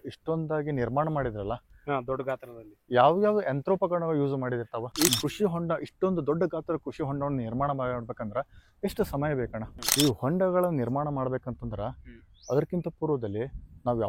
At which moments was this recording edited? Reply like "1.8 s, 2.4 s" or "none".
4.9 s, 9.6 s